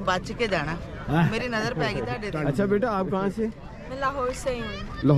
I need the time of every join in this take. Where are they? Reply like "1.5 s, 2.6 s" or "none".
2.5 s